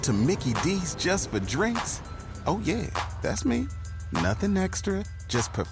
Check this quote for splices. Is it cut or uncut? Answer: uncut